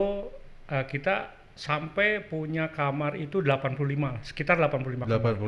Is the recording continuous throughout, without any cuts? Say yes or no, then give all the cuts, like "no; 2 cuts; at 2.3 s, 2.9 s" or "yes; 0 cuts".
yes; 0 cuts